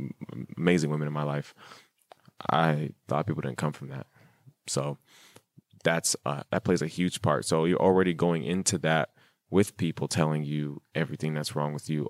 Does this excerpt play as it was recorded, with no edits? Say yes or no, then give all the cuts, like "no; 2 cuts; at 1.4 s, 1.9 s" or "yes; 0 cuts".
yes; 0 cuts